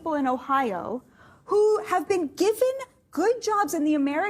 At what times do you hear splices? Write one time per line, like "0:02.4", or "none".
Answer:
none

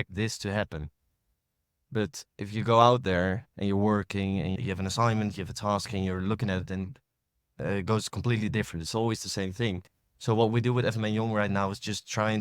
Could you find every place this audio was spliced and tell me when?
0:04.6

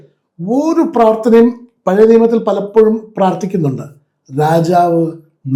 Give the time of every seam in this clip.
none

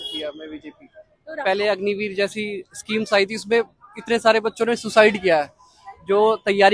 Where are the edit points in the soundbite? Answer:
0:01.4

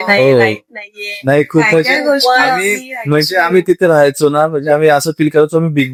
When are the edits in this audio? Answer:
none

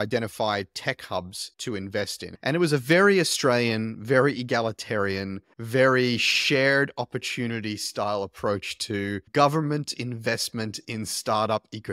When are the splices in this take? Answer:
0:02.2

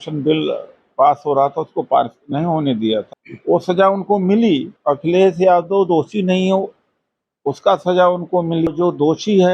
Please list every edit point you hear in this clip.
0:03.1
0:04.7
0:08.7

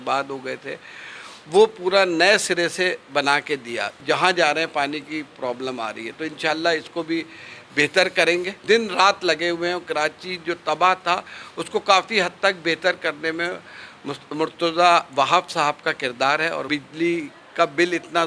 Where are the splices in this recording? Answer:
0:04.0
0:08.6
0:16.6

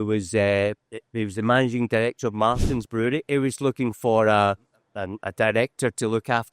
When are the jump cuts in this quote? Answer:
0:03.3

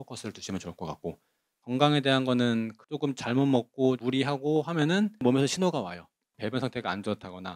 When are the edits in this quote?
0:01.5
0:02.8

